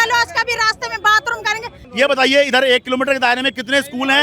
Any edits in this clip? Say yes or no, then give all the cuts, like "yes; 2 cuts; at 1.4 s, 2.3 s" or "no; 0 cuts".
yes; 1 cut; at 1.8 s